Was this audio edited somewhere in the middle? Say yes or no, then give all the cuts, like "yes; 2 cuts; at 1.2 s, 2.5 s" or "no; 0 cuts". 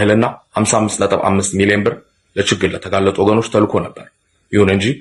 no; 0 cuts